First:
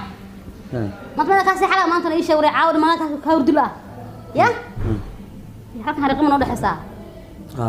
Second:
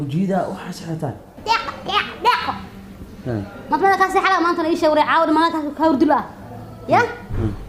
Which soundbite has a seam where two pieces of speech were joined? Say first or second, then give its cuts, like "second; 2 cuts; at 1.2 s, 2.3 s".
second; 1 cut; at 1.4 s